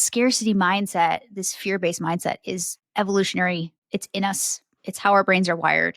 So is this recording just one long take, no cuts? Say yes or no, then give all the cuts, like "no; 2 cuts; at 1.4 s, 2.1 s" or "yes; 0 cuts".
no; 2 cuts; at 2.8 s, 3.8 s